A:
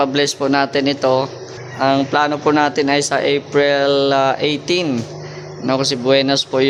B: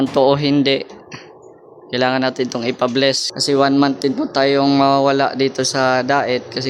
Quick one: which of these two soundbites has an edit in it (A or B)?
B